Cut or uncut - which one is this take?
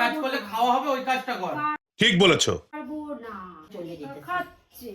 cut